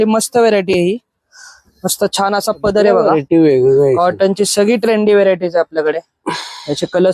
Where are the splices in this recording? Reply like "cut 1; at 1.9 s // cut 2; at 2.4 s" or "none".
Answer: cut 1; at 3.1 s